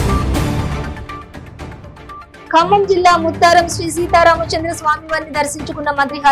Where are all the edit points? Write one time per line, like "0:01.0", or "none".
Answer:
none